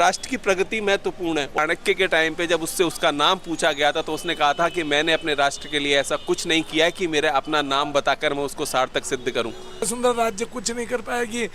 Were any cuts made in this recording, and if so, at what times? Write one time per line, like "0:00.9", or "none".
0:01.6
0:09.9